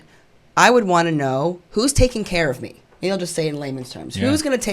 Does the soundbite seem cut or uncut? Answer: cut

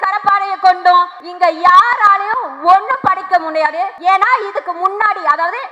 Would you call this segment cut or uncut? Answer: cut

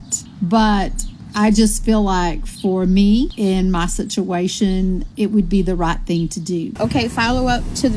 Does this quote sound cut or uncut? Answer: cut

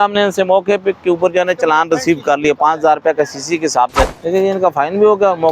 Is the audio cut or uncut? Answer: cut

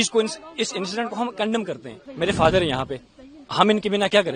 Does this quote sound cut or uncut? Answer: cut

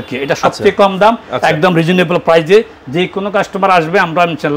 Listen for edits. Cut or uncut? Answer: uncut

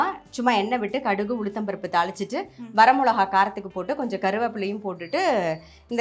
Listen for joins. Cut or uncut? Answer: uncut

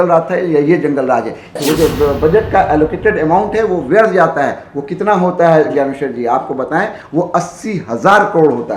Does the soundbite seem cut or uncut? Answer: cut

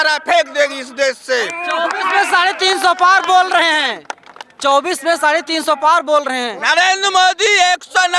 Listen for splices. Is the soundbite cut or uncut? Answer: uncut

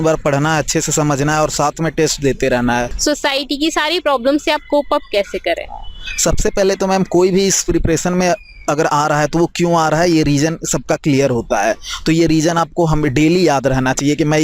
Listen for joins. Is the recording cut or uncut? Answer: cut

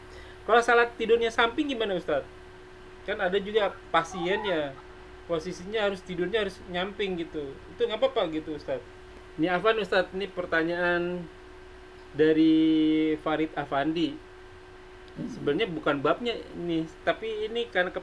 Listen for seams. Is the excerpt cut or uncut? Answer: cut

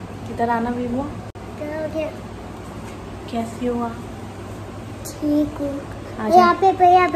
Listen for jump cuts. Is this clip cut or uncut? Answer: uncut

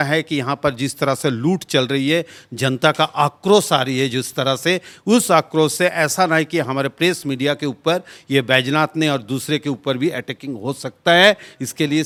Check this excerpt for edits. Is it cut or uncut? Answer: uncut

